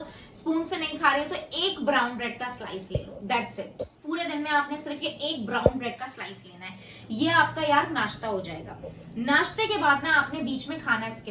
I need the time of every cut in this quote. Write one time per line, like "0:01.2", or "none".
none